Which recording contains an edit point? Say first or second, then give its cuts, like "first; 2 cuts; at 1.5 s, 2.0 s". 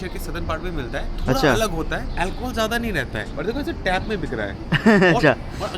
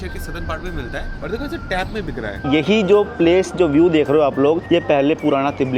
second; 3 cuts; at 1.1 s, 2.4 s, 4.6 s